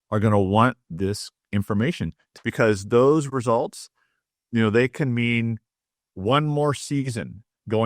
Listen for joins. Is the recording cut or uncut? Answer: cut